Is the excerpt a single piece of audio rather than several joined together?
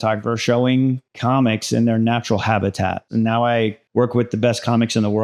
no; 1 cut; at 3.0 s

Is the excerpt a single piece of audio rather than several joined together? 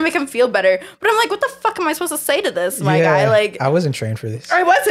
yes; 0 cuts

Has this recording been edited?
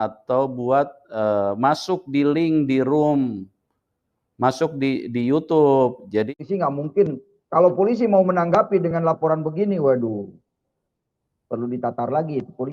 yes; 1 cut; at 6.3 s

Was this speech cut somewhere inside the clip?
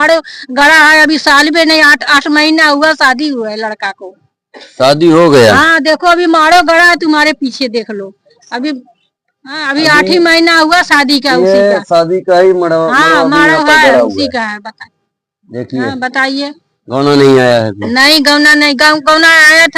no; 0 cuts

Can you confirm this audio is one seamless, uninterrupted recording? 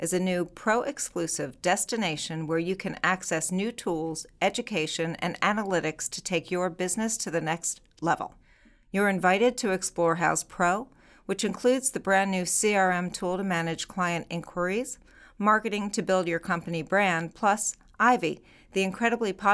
yes; 0 cuts

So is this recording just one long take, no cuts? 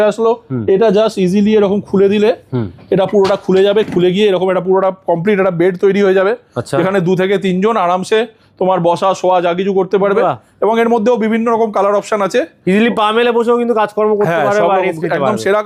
yes; 0 cuts

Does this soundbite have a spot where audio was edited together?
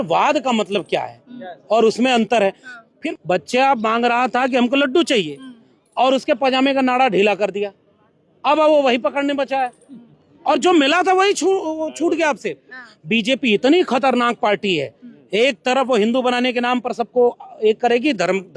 yes; 1 cut; at 3.0 s

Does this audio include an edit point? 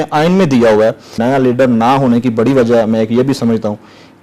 yes; 1 cut; at 1.1 s

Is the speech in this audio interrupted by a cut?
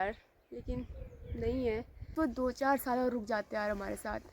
yes; 1 cut; at 2.1 s

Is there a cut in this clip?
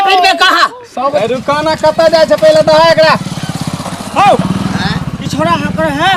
yes; 1 cut; at 1.2 s

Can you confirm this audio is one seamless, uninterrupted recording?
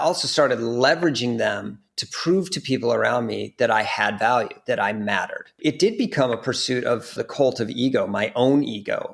no; 2 cuts; at 5.5 s, 7.2 s

